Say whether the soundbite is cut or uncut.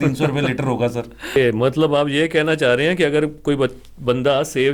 cut